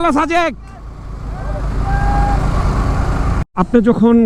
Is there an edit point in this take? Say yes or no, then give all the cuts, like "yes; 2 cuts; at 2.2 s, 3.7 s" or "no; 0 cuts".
no; 0 cuts